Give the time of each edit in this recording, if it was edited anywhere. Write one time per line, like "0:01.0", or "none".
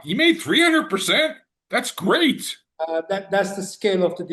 0:02.6